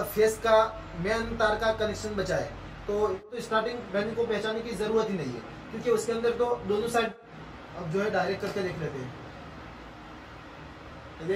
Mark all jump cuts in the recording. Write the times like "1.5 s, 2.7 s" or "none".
3.2 s, 7.2 s